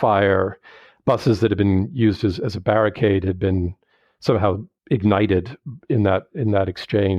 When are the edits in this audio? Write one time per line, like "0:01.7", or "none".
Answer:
0:04.7

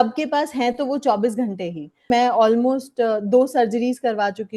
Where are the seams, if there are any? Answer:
0:02.1

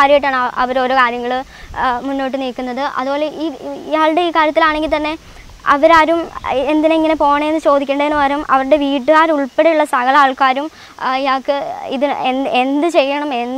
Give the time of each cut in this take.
none

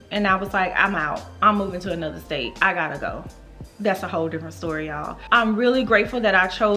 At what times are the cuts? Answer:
none

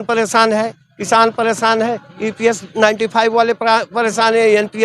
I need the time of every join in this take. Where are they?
none

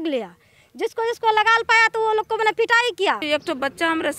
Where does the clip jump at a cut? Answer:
0:03.2

